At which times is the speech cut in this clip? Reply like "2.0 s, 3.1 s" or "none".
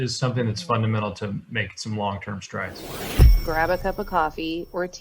3.2 s